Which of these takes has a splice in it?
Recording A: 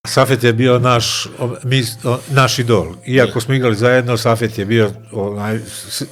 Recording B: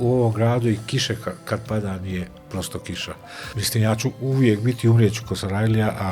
B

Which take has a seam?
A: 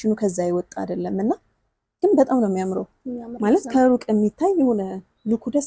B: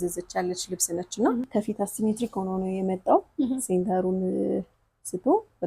B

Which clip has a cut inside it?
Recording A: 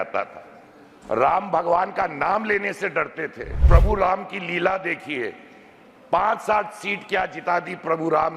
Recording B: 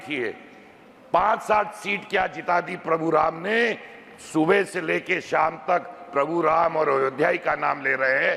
A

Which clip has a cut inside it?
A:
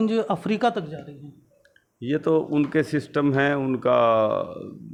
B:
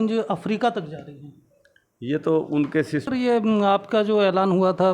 B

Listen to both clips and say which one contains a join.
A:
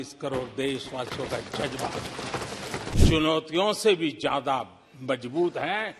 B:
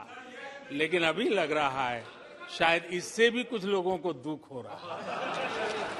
A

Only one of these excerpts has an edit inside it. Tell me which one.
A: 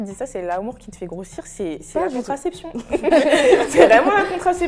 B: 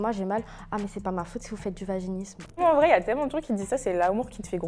B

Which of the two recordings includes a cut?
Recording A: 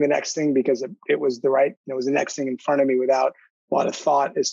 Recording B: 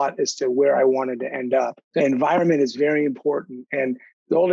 B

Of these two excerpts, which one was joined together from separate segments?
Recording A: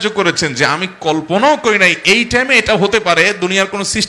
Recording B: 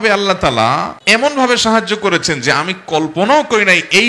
B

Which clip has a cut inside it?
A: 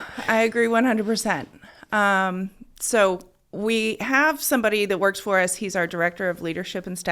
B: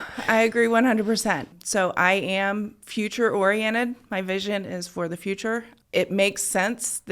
B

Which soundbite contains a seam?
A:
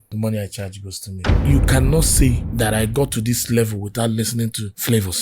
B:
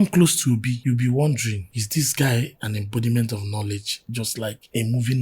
A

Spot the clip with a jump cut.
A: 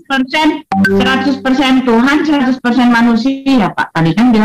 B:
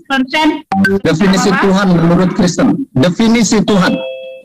B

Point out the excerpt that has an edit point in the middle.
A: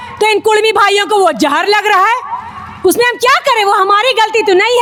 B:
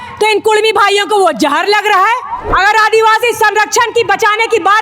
B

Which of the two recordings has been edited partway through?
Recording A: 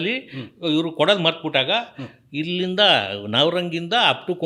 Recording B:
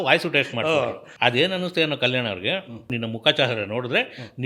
B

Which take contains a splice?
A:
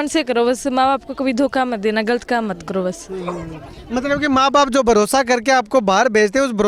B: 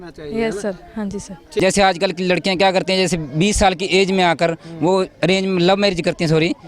B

